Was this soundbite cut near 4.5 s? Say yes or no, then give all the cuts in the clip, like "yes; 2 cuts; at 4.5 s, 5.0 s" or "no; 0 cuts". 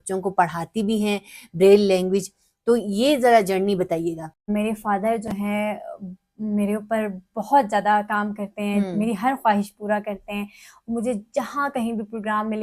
yes; 1 cut; at 4.5 s